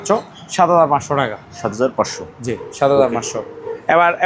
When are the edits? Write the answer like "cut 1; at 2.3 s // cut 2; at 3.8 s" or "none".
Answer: none